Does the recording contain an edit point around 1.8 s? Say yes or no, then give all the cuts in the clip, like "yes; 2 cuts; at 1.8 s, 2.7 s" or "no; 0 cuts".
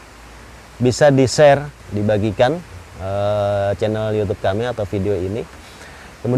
yes; 1 cut; at 1.8 s